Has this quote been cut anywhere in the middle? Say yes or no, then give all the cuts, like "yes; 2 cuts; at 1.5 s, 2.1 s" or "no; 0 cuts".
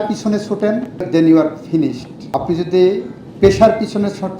yes; 2 cuts; at 1.1 s, 2.1 s